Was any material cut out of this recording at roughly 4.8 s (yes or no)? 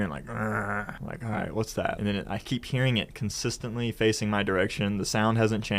no